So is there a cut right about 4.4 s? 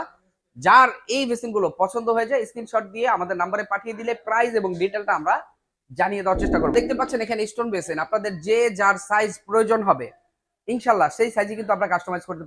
no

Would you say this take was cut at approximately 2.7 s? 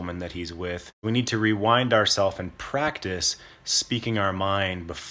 no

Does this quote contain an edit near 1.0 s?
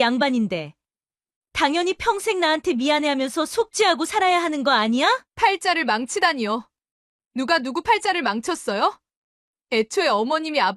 no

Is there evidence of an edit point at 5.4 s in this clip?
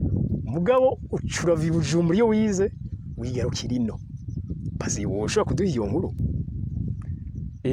no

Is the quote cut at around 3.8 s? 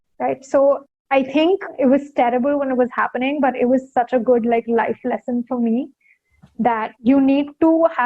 no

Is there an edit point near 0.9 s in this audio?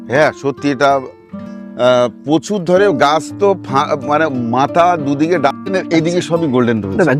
no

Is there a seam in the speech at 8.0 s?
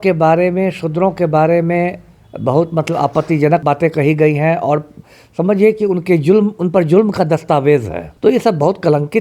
yes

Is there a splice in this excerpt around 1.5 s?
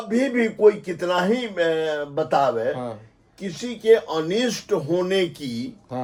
no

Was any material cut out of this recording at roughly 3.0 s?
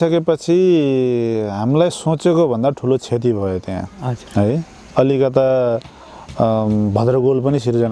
no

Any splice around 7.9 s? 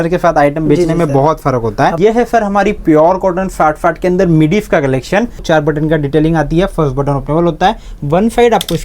no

